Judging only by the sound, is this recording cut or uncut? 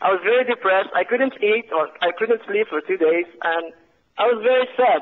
uncut